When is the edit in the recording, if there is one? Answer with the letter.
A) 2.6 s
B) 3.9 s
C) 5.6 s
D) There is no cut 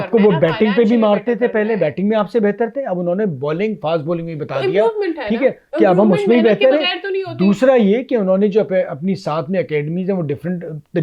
D